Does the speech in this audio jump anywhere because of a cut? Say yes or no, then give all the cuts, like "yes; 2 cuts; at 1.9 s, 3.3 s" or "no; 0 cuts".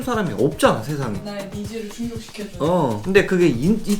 yes; 2 cuts; at 1.2 s, 3.0 s